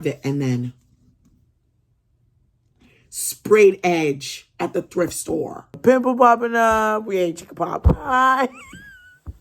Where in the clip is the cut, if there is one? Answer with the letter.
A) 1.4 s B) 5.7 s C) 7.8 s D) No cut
B